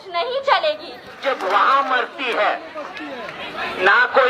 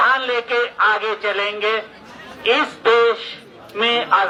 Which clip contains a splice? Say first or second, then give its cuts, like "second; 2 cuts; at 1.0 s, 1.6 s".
first; 1 cut; at 1.2 s